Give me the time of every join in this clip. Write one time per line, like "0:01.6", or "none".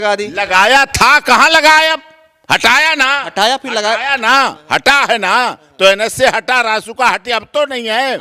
none